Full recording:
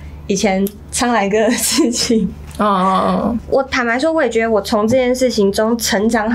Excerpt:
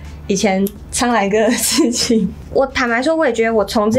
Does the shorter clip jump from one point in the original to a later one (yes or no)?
yes